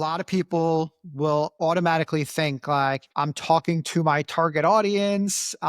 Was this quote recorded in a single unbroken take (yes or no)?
no